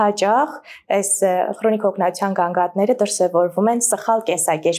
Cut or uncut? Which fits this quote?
uncut